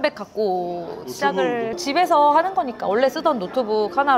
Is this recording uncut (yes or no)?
no